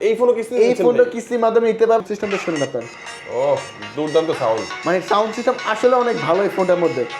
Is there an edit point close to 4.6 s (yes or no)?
no